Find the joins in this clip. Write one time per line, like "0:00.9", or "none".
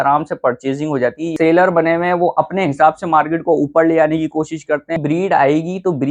0:01.3
0:05.0